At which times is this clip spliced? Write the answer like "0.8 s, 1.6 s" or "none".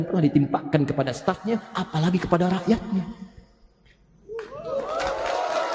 none